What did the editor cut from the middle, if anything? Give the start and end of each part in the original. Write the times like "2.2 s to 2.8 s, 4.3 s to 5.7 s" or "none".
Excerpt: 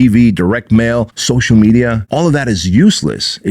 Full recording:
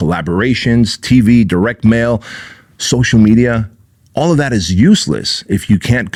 2.3 s to 2.8 s, 3.6 s to 4.1 s